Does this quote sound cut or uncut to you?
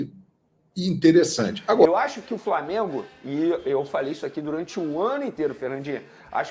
cut